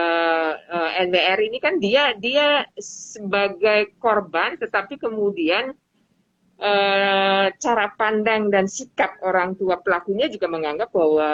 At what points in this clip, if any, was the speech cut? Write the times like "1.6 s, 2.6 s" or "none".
none